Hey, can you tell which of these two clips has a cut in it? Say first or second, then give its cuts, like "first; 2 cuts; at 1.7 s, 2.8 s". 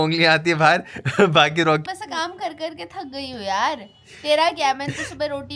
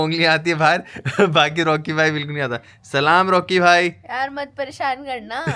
first; 1 cut; at 1.8 s